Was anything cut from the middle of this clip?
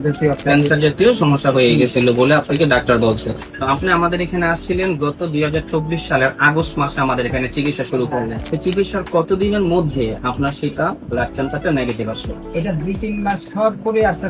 yes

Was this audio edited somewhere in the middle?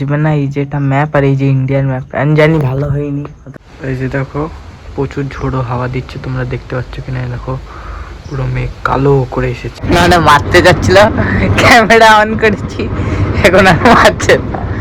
yes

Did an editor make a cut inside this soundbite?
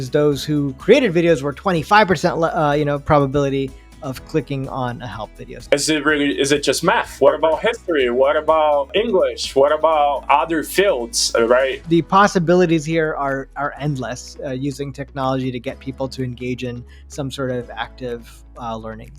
yes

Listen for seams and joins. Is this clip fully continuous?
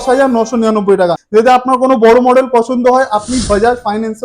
no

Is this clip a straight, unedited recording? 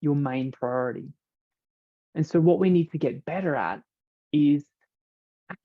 yes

